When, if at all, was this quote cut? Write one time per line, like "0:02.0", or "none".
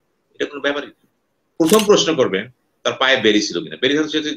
0:01.5

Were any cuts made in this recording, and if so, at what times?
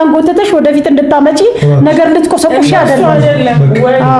none

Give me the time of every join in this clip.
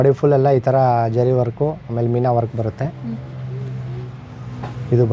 none

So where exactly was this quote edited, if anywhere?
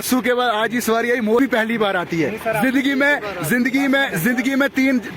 0:01.4

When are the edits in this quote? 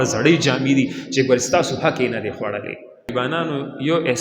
0:03.1

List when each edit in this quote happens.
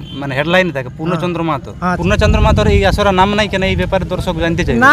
0:02.0

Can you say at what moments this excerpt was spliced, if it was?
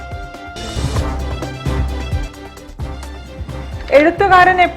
0:03.1

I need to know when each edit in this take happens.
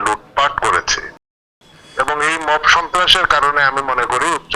0:01.2

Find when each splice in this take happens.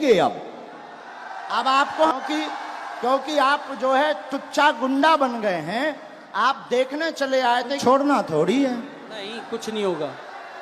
0:02.1
0:07.8

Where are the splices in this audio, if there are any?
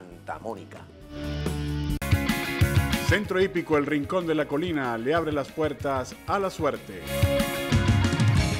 0:02.0

